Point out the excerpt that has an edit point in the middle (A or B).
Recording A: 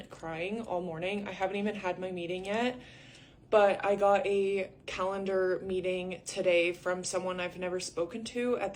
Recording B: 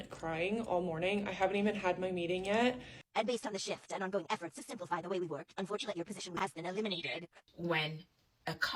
B